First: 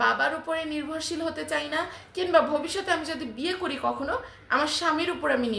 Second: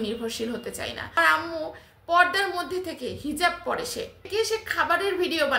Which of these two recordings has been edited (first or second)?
second